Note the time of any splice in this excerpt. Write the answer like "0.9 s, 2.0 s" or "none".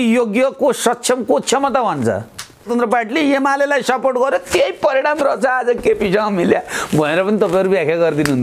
2.6 s